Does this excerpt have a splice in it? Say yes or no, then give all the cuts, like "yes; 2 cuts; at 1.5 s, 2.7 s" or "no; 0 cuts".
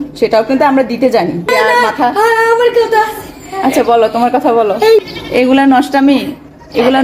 yes; 2 cuts; at 1.5 s, 5.0 s